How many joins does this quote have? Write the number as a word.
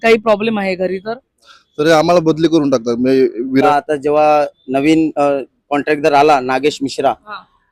one